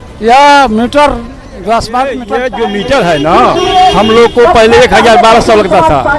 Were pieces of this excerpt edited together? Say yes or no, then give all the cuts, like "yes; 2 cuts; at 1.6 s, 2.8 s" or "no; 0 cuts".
yes; 1 cut; at 2.3 s